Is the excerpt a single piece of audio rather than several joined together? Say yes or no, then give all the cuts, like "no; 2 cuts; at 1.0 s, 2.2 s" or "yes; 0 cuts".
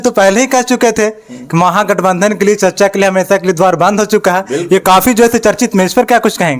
yes; 0 cuts